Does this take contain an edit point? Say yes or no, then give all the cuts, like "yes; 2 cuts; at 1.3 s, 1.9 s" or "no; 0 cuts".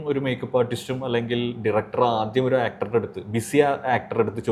no; 0 cuts